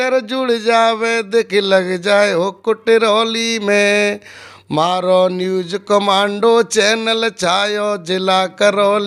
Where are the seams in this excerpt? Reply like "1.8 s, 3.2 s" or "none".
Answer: none